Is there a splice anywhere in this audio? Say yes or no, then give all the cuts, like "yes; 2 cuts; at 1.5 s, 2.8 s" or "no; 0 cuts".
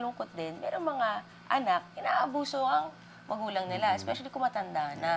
no; 0 cuts